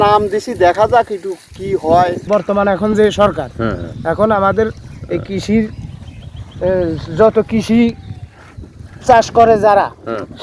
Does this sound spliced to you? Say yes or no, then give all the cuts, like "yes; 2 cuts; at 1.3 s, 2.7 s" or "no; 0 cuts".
yes; 1 cut; at 2.2 s